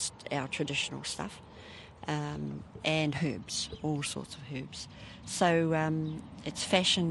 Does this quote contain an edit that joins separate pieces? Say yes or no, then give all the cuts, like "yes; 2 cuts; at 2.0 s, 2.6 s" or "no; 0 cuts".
no; 0 cuts